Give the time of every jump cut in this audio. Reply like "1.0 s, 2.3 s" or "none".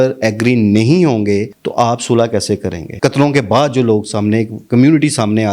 2.8 s